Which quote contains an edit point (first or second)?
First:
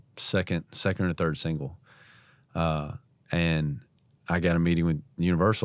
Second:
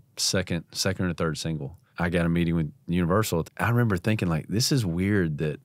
second